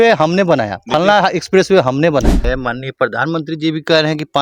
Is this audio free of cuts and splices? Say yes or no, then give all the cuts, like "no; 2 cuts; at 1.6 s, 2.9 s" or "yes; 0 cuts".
no; 1 cut; at 2.4 s